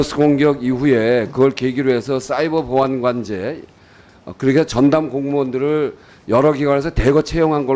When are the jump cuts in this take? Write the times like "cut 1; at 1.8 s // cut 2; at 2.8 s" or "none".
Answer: none